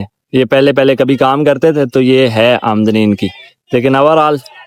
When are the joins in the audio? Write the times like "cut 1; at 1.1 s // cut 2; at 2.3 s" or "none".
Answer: none